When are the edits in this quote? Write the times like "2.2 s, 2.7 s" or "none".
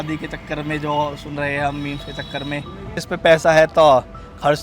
3.0 s